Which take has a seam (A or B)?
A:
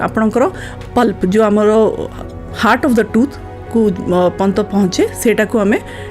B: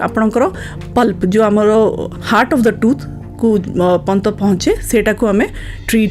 B